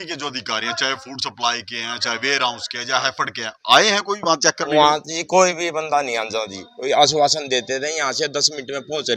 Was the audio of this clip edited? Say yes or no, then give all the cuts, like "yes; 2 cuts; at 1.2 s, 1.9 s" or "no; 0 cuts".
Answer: no; 0 cuts